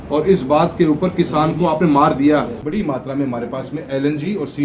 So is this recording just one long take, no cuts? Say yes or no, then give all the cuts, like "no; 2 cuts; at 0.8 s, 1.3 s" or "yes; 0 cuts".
no; 2 cuts; at 2.6 s, 3.8 s